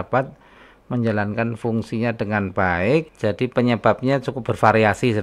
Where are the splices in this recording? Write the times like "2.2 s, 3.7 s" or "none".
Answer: 3.1 s